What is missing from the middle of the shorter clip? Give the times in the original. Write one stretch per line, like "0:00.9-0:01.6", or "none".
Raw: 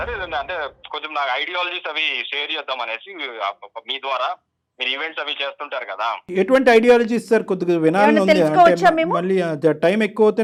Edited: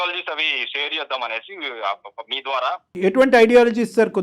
0:04.5-0:06.2